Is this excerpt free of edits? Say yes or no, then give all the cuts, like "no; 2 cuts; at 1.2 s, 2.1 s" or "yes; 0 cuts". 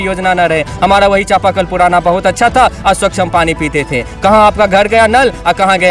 yes; 0 cuts